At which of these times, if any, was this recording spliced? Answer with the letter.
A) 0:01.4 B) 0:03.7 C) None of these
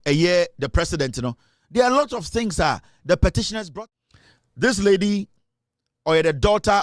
B